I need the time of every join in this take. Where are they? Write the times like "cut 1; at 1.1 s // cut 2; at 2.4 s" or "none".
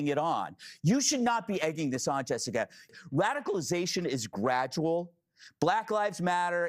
cut 1; at 2.8 s